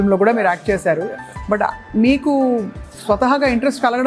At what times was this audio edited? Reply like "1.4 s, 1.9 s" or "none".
none

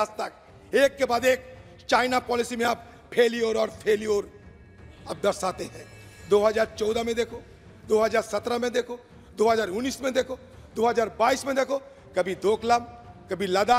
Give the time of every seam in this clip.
none

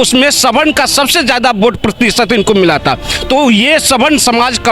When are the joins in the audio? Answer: none

